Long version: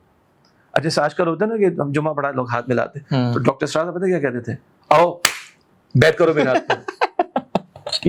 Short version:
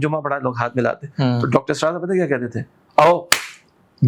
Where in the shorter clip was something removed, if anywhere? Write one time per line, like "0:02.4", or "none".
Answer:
none